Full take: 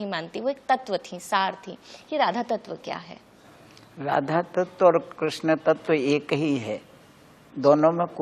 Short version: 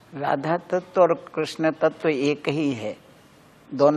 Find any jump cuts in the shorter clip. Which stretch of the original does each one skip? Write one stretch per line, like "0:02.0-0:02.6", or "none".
none